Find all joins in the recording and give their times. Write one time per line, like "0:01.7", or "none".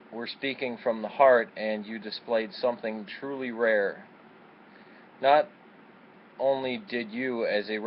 0:03.0